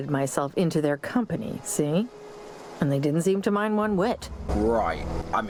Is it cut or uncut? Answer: uncut